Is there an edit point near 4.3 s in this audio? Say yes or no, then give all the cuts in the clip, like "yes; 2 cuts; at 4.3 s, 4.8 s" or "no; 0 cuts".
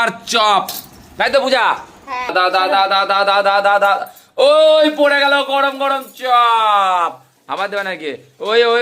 no; 1 cut; at 2.3 s